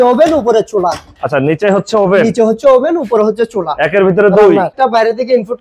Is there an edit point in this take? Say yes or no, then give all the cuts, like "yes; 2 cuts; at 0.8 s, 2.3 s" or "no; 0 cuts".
yes; 1 cut; at 4.7 s